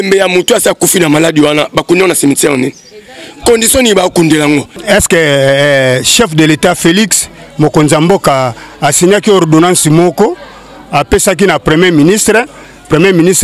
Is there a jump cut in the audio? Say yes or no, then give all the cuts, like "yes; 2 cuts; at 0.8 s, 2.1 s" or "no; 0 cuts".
yes; 1 cut; at 4.7 s